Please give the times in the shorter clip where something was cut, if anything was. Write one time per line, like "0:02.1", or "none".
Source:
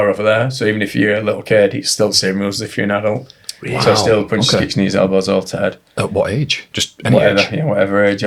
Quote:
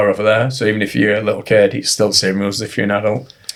none